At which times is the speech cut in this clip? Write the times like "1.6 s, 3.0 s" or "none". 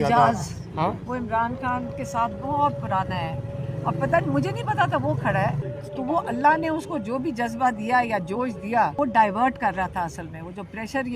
5.7 s, 8.9 s